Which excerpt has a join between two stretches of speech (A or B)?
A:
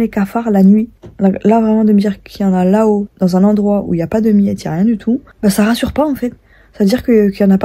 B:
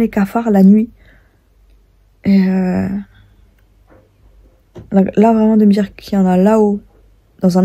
A